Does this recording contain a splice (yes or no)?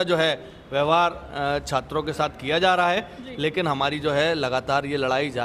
no